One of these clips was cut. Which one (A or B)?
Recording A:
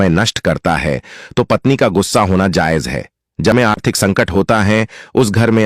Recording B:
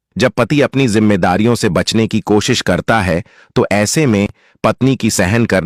A